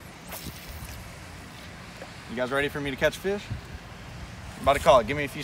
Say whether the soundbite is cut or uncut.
uncut